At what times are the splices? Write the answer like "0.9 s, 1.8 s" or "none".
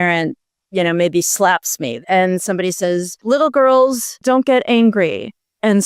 1.9 s, 3.1 s, 4.2 s